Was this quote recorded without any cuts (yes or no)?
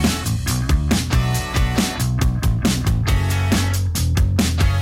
no